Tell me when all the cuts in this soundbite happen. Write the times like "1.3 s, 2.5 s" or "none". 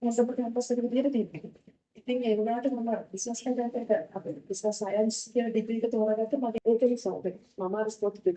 6.5 s